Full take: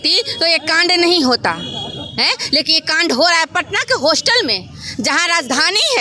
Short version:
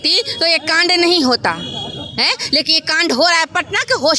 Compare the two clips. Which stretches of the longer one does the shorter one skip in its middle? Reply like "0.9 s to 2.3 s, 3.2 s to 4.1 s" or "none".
none